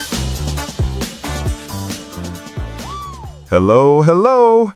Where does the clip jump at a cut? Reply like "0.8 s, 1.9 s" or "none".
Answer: 3.3 s